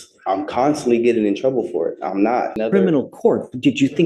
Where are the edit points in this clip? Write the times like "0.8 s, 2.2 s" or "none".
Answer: 2.6 s